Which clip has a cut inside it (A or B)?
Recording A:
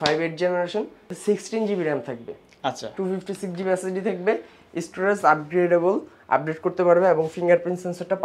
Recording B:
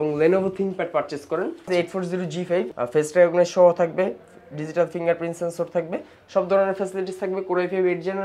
B